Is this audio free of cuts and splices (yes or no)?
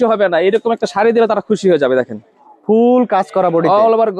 yes